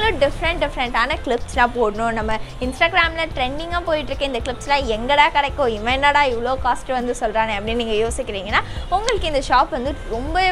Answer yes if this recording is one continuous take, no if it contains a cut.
yes